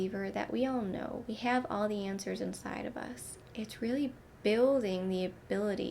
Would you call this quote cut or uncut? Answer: cut